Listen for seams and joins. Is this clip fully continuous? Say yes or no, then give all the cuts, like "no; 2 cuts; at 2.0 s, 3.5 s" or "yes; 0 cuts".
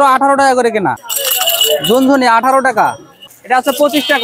no; 2 cuts; at 1.1 s, 3.2 s